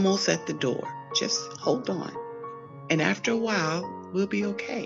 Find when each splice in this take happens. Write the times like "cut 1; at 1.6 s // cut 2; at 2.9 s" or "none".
none